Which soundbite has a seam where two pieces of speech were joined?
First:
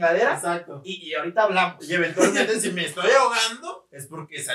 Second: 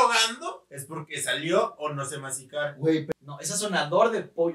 second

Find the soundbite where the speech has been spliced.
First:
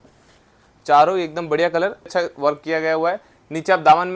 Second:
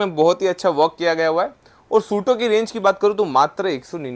first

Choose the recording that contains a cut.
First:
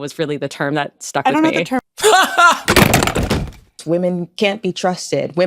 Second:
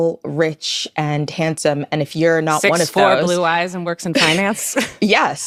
first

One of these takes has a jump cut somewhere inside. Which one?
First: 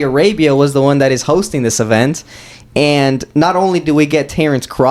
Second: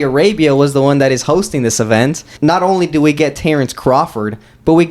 second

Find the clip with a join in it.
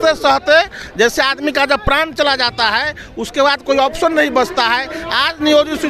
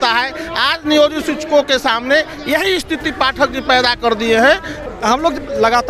second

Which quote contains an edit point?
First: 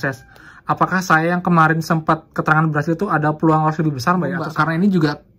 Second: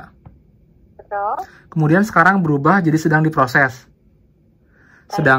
first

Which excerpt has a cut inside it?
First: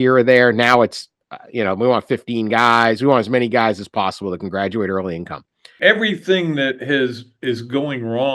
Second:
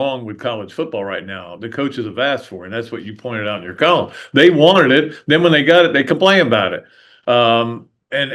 first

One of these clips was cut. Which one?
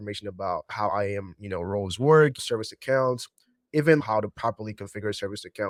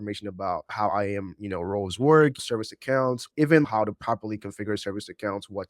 second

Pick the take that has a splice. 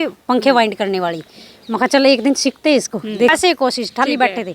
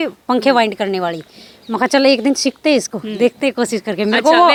first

